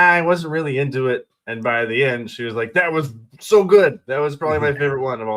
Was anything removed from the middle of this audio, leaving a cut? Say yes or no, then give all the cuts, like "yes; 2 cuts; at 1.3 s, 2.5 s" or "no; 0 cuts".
no; 0 cuts